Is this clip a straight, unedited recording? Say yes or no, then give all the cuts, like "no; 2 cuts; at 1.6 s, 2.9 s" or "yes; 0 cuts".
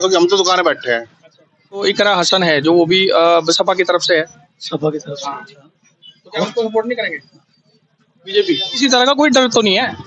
no; 2 cuts; at 1.8 s, 8.7 s